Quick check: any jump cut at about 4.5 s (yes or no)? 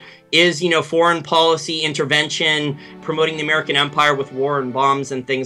no